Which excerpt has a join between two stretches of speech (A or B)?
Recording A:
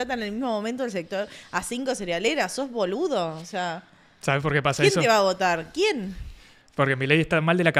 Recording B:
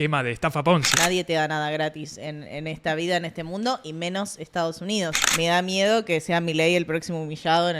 B